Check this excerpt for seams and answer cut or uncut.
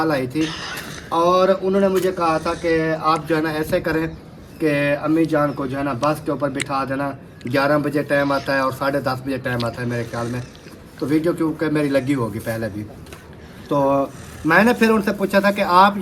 uncut